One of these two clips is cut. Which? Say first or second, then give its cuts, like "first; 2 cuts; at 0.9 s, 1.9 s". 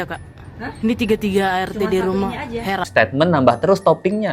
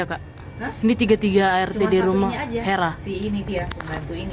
first; 1 cut; at 2.9 s